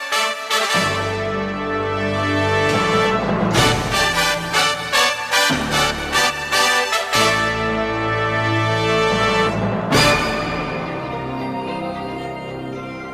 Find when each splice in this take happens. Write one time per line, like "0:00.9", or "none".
0:06.8
0:12.1